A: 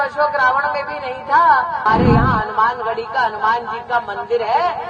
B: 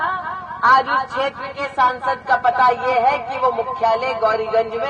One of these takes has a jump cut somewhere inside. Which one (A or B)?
A